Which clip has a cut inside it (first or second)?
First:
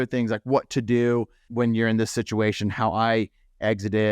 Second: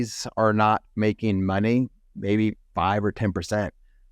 first